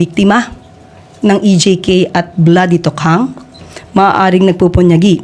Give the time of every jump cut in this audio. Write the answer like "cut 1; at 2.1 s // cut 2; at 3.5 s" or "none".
none